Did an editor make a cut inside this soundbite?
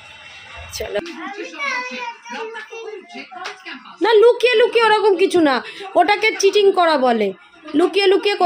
yes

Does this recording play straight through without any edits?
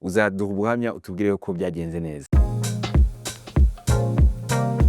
no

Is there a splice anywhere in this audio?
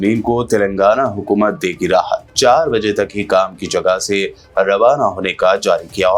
no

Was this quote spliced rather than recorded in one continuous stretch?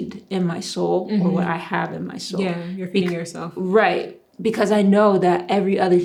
no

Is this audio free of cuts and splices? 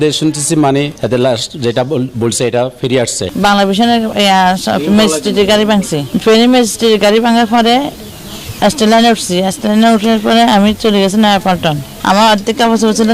no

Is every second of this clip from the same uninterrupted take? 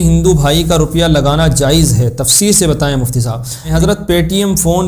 no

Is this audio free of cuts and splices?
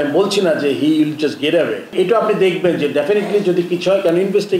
no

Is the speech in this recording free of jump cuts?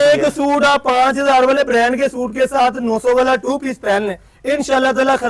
yes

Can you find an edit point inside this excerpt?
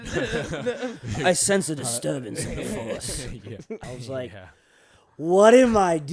yes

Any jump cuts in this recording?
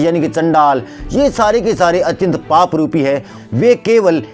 yes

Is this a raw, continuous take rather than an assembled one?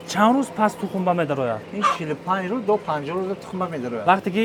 yes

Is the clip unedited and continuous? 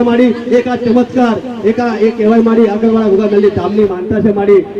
yes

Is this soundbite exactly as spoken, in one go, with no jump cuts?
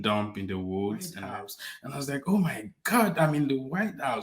no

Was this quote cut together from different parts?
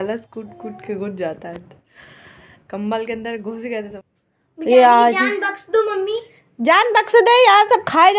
yes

